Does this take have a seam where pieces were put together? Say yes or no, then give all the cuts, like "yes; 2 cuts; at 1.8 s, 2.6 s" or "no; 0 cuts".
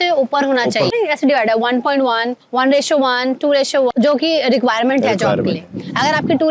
yes; 2 cuts; at 0.9 s, 3.9 s